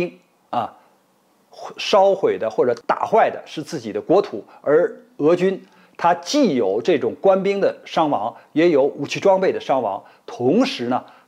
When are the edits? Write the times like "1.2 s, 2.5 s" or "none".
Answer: 2.8 s